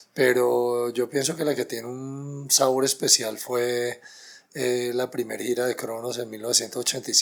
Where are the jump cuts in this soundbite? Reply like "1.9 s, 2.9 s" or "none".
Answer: none

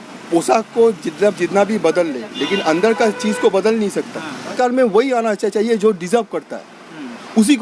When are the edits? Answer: 4.5 s

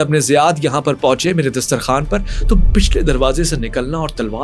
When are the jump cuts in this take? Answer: none

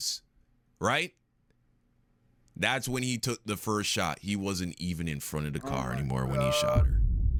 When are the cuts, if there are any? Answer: none

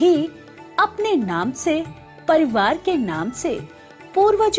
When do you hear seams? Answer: none

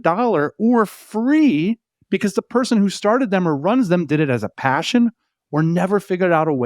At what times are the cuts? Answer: 1.9 s

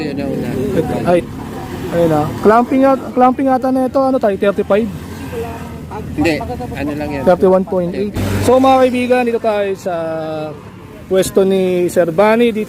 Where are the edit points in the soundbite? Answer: 1.2 s, 8.2 s

